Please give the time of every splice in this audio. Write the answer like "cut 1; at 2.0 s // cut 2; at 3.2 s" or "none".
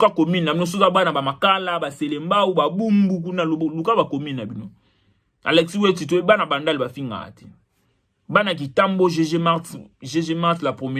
none